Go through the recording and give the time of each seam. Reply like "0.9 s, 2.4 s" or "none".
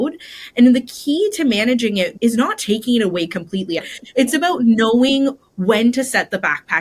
2.1 s, 3.9 s